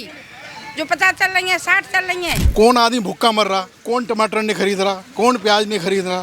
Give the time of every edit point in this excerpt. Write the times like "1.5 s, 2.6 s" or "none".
2.4 s